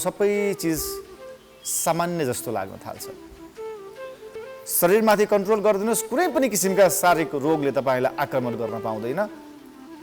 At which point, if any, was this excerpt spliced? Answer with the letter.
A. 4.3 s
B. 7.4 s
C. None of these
A